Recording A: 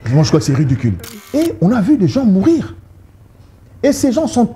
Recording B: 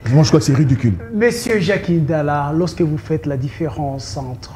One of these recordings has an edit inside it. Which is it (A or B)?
A